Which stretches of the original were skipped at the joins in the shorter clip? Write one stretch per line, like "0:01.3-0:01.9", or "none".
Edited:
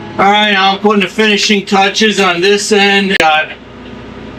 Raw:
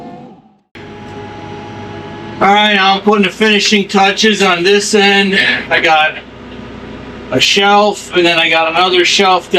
0:05.4-0:05.8